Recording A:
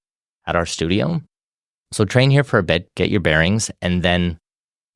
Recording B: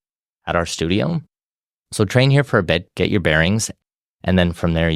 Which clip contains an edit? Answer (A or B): B